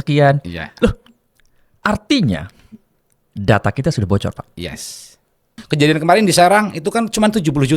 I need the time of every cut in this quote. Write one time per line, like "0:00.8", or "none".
0:05.5